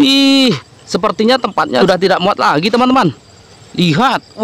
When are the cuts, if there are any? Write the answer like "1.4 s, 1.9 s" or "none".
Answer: 1.8 s